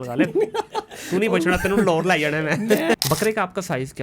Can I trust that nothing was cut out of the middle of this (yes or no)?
no